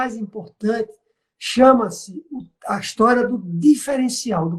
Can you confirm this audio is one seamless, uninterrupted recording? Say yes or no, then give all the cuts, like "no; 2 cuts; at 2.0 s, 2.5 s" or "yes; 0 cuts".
yes; 0 cuts